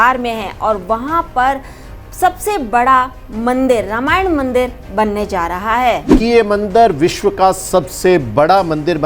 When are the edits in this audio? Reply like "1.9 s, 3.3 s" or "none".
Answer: 6.1 s